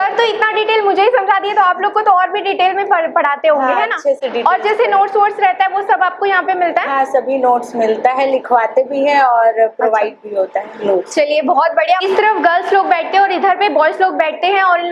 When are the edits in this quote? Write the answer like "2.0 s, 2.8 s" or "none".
none